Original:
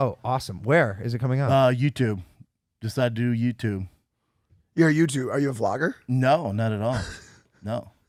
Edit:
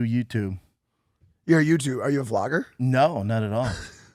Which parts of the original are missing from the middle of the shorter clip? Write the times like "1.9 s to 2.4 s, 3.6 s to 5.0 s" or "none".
none